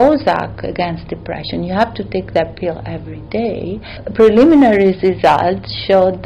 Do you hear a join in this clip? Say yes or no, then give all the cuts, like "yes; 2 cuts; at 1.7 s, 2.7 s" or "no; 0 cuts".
yes; 1 cut; at 4.0 s